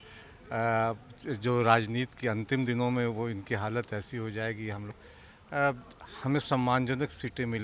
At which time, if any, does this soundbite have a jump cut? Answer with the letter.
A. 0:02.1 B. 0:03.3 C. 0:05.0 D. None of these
C